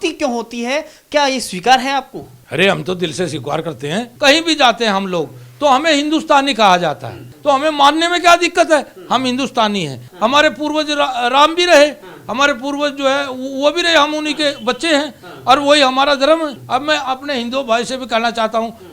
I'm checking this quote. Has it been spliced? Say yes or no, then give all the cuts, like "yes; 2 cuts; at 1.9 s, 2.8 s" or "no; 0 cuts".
yes; 4 cuts; at 4.1 s, 7.3 s, 10.1 s, 16.6 s